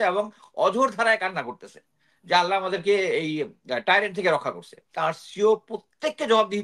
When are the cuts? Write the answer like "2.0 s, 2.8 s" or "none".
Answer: 4.9 s